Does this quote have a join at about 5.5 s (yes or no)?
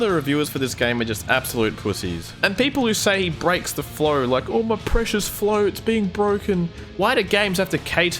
no